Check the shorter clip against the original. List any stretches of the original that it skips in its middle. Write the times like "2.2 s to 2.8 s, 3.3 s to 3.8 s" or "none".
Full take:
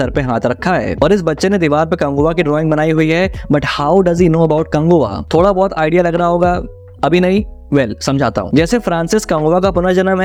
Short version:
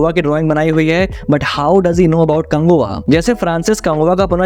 5.2 s to 8.4 s